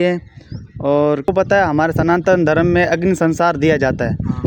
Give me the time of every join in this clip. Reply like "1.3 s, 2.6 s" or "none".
1.3 s